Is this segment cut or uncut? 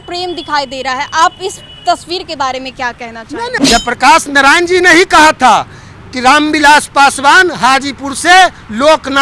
cut